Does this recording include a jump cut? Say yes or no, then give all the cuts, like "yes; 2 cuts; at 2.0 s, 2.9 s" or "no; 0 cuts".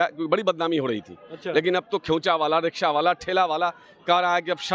no; 0 cuts